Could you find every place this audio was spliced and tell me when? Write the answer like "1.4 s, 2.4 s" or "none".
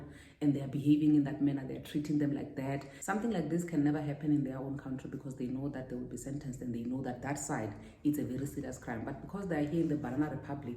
2.9 s